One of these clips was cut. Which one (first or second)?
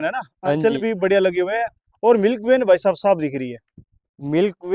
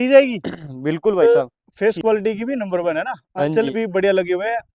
second